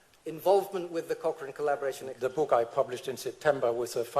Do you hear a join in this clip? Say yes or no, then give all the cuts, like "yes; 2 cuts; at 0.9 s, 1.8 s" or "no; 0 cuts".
yes; 1 cut; at 2.1 s